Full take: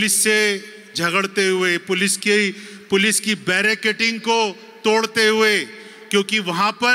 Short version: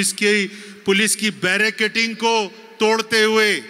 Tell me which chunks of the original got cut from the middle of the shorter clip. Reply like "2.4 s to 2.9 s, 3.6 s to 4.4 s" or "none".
none

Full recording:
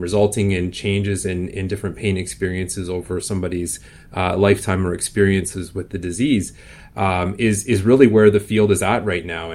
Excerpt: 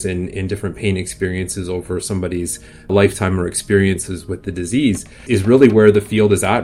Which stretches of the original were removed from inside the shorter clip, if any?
4.1 s to 4.4 s, 6.7 s to 7.6 s

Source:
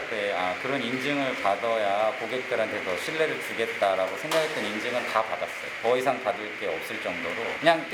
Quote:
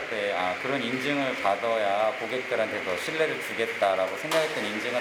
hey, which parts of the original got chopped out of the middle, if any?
none

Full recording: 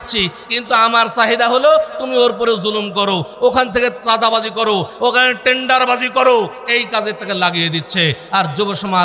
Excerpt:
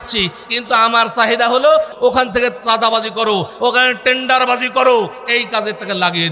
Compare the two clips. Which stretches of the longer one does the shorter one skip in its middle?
1.9 s to 3.3 s

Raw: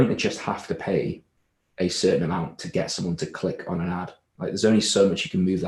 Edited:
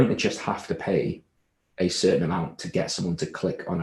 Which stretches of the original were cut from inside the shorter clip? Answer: none

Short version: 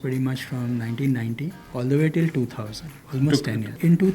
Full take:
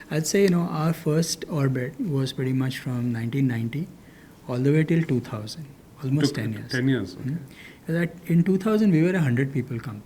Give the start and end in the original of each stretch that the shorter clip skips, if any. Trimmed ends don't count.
3.9 s to 4.3 s, 5.9 s to 7.6 s

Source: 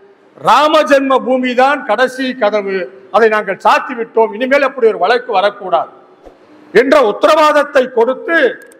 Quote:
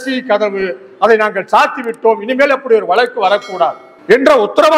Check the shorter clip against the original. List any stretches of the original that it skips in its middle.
6.0 s to 6.5 s

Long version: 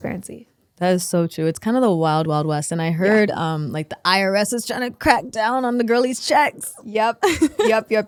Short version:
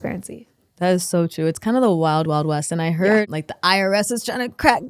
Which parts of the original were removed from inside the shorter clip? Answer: 3.3 s to 3.7 s

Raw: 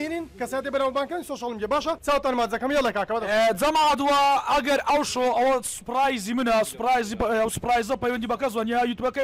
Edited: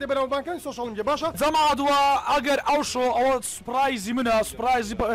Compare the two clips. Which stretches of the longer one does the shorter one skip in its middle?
2.0 s to 3.6 s

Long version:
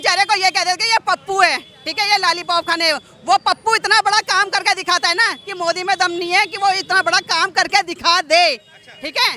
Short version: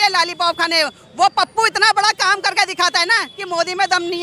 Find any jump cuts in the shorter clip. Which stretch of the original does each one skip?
none

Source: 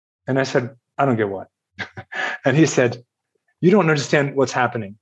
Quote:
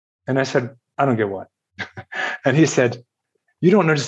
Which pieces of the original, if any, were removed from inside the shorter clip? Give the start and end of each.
none

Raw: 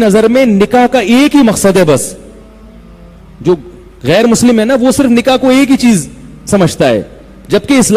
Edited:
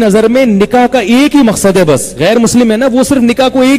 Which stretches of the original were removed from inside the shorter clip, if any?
2.1 s to 4.0 s

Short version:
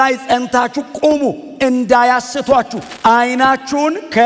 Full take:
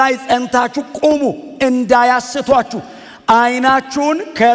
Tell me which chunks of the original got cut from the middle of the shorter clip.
2.8 s to 3.1 s

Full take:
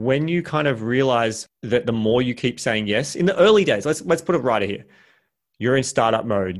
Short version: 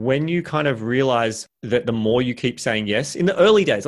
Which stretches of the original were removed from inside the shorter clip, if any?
none

